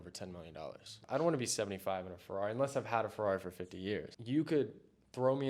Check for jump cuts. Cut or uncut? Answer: cut